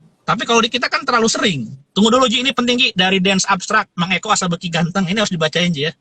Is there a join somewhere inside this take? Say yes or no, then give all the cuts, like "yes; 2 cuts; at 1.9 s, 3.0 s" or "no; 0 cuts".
yes; 1 cut; at 1.8 s